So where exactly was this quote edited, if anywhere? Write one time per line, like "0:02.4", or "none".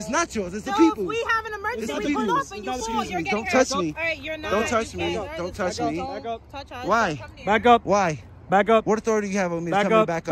none